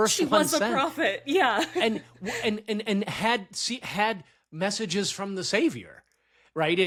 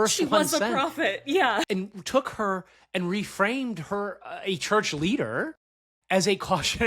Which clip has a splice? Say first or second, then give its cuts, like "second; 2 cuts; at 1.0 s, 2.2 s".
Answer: second; 1 cut; at 1.7 s